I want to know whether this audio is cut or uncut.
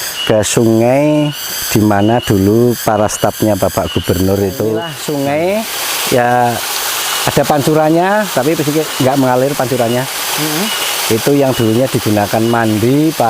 cut